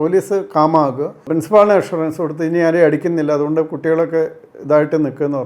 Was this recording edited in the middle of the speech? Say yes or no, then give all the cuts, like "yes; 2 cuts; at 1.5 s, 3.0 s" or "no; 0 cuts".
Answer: yes; 1 cut; at 1.3 s